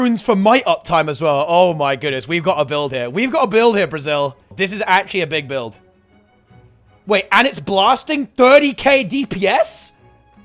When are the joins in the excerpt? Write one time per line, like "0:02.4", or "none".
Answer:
0:04.6